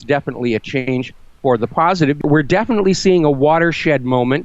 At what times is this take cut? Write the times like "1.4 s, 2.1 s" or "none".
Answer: 2.2 s